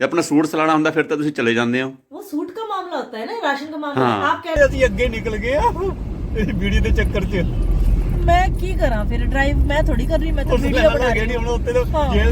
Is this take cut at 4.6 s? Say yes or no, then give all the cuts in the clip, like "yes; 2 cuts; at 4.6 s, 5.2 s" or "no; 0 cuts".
yes; 1 cut; at 4.6 s